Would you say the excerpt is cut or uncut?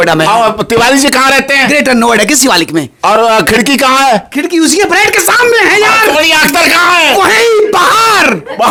uncut